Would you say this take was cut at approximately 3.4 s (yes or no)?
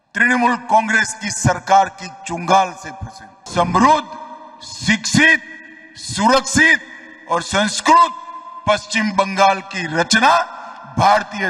yes